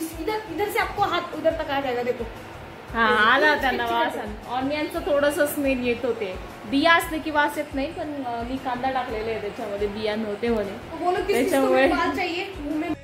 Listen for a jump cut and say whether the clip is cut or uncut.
uncut